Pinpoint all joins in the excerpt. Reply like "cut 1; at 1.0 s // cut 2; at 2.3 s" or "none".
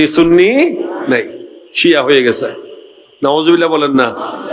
none

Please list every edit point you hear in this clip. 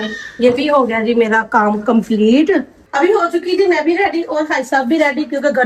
cut 1; at 2.8 s

